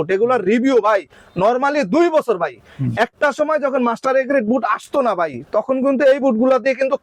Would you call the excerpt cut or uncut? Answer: uncut